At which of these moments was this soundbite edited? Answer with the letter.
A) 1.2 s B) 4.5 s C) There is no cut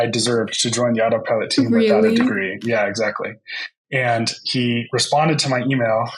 C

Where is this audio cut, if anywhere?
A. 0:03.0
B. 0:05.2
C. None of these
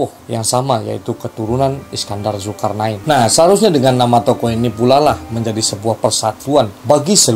A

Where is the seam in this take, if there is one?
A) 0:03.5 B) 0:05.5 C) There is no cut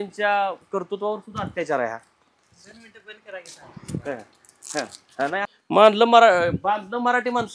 B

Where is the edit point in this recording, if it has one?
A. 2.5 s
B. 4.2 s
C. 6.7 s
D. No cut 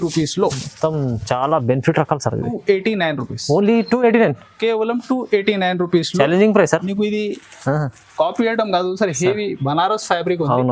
A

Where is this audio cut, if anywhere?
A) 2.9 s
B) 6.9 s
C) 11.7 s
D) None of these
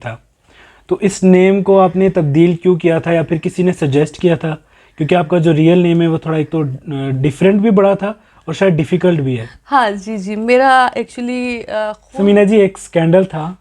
C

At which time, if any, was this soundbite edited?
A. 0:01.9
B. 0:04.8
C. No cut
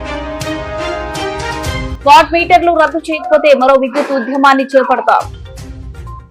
C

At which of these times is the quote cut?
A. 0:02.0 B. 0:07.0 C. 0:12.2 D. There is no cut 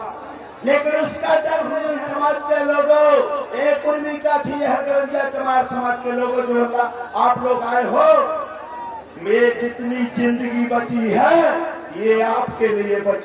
A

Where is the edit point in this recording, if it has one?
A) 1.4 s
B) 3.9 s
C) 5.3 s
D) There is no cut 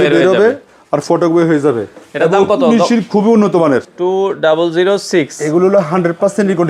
B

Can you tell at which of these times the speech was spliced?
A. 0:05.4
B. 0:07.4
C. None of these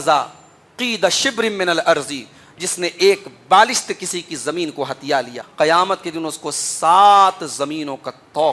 A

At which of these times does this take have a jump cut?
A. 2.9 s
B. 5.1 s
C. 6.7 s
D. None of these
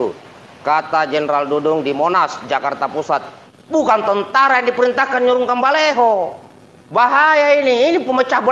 A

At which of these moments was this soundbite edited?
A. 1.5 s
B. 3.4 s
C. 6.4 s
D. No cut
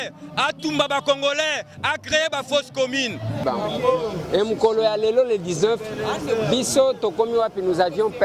B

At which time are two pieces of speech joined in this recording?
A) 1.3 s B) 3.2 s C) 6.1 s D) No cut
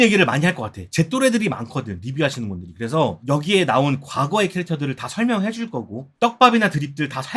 B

